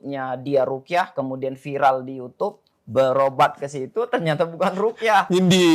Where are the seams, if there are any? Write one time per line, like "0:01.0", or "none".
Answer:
none